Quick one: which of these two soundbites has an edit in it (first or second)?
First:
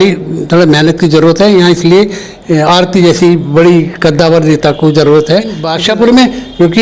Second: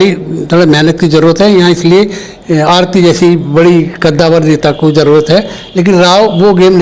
first